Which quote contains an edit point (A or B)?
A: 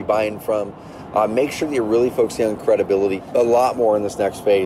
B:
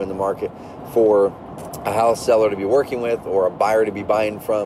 A